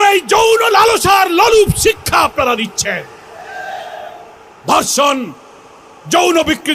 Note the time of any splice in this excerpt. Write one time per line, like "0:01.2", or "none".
none